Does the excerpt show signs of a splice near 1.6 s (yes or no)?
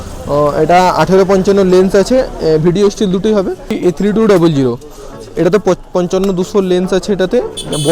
no